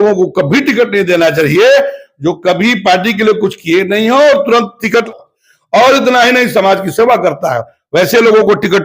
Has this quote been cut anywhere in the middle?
yes; 1 cut; at 5.1 s

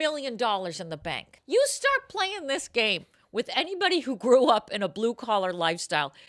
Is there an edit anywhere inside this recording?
yes; 1 cut; at 1.4 s

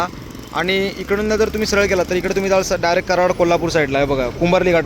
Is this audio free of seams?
yes; 0 cuts

